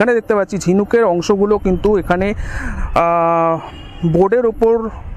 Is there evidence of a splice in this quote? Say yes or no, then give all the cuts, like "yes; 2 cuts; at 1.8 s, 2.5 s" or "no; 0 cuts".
no; 0 cuts